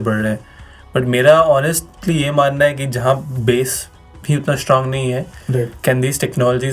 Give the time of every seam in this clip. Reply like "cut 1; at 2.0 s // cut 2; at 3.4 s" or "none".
none